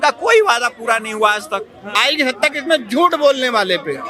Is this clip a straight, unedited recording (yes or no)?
no